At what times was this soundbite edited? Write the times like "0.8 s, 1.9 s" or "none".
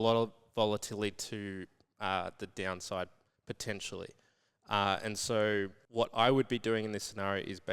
5.8 s